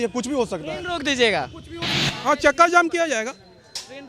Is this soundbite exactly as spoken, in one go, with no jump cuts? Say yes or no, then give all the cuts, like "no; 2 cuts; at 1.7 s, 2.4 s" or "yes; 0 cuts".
no; 1 cut; at 2.1 s